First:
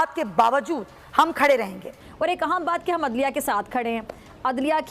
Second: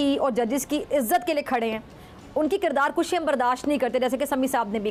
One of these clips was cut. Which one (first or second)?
first